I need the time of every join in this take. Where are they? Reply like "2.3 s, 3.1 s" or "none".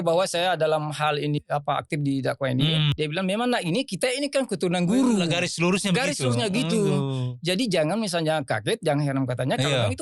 1.4 s, 2.9 s